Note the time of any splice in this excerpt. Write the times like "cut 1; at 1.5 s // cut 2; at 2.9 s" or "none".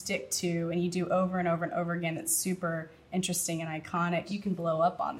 cut 1; at 4.3 s

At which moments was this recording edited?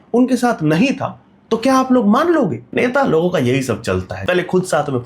cut 1; at 2.7 s // cut 2; at 4.1 s

